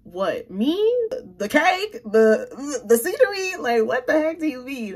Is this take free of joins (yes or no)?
yes